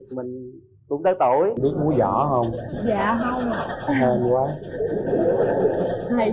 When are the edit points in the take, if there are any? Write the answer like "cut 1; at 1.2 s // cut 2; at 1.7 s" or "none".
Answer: cut 1; at 1.6 s